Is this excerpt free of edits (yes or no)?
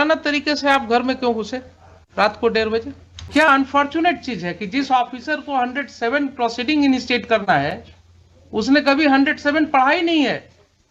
no